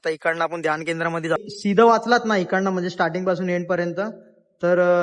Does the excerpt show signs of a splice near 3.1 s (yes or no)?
no